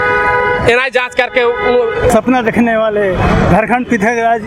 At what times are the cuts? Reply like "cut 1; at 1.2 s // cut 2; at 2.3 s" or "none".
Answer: cut 1; at 2.1 s